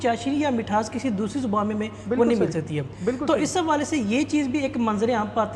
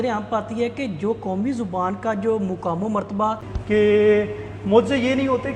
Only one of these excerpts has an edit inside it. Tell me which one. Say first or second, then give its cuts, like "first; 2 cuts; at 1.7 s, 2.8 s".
second; 1 cut; at 3.5 s